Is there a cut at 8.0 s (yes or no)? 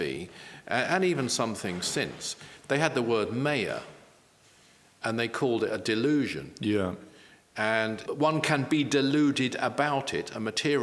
yes